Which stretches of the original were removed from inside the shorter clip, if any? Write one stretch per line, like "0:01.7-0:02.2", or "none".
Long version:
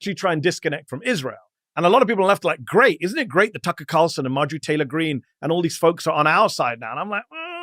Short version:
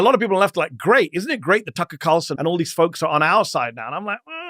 0:04.2-0:05.3